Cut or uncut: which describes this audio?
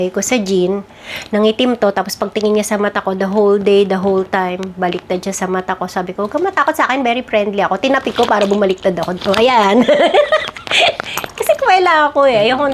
uncut